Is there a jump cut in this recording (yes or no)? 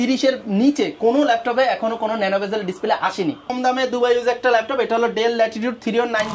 yes